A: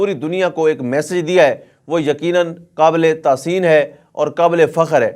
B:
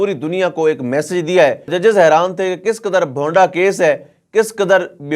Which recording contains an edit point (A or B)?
B